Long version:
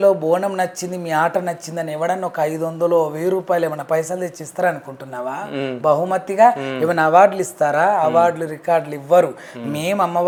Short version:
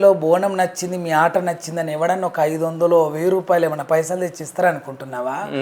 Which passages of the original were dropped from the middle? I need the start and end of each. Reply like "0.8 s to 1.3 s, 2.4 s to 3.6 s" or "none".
none